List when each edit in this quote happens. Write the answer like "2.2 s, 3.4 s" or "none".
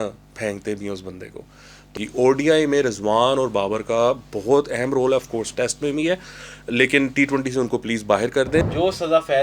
1.9 s, 8.6 s